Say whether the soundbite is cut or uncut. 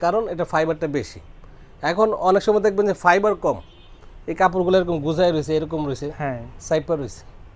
uncut